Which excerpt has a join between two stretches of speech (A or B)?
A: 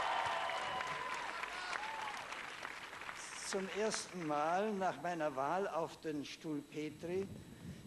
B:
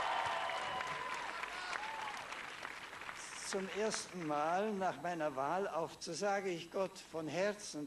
A